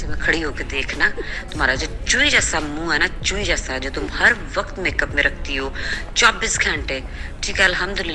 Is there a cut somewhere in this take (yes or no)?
no